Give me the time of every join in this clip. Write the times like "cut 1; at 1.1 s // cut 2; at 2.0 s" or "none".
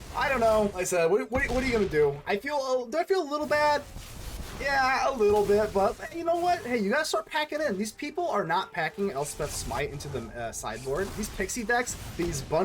cut 1; at 0.7 s // cut 2; at 11.1 s

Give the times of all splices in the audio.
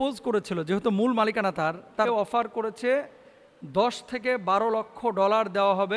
cut 1; at 2.1 s

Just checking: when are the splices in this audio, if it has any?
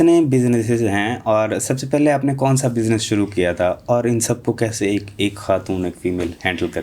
none

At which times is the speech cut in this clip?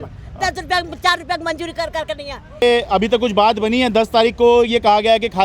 cut 1; at 2.6 s

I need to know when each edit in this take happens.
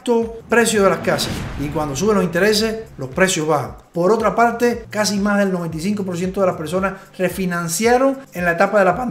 cut 1; at 1.4 s // cut 2; at 4.9 s

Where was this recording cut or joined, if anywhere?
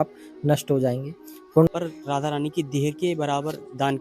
cut 1; at 1.7 s

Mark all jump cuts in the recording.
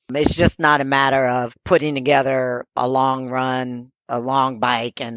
cut 1; at 1.5 s // cut 2; at 2.8 s // cut 3; at 4.1 s

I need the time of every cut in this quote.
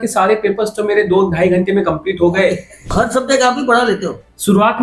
cut 1; at 2.9 s

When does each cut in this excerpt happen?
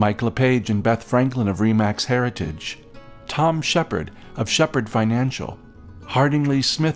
none

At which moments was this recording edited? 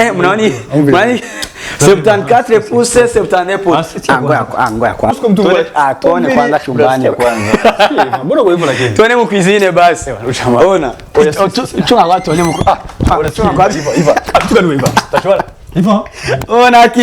cut 1; at 5.1 s

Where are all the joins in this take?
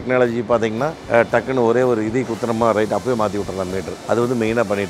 cut 1; at 1.0 s // cut 2; at 3.9 s

